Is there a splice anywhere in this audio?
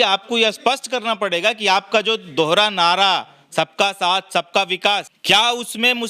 yes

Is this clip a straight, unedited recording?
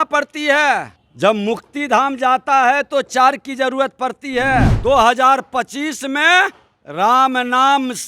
no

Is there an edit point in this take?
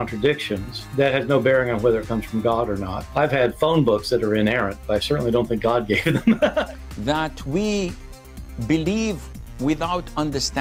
no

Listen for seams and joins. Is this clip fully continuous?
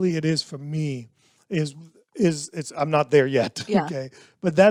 yes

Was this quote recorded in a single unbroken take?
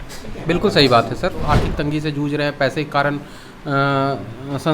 no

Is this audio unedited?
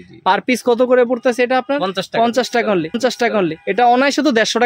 yes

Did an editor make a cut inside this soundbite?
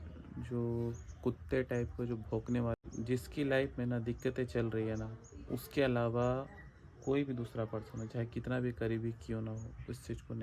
yes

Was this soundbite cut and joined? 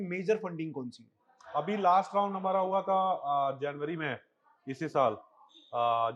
no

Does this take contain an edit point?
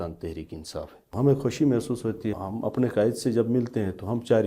yes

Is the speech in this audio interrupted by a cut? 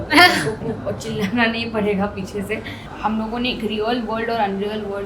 yes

